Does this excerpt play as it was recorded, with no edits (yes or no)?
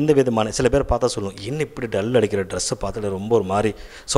yes